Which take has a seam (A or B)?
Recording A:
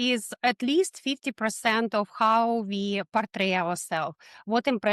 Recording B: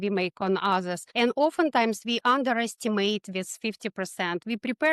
B